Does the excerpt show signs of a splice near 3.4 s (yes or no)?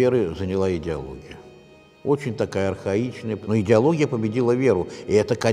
yes